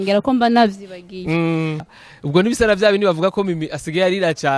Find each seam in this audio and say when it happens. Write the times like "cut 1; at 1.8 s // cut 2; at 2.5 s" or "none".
cut 1; at 1.9 s